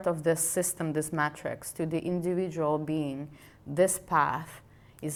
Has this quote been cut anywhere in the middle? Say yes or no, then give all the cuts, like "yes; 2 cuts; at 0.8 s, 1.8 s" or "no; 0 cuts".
no; 0 cuts